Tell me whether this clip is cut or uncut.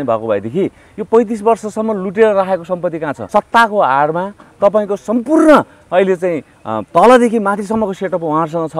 cut